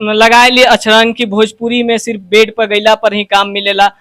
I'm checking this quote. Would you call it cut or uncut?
uncut